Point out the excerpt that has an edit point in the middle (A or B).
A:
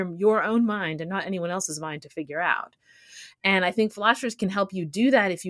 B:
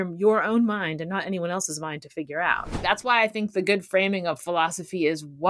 B